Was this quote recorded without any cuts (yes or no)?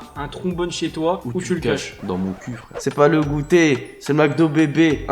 no